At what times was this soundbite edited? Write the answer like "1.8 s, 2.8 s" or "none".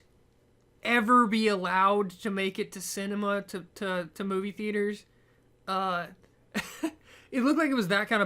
6.4 s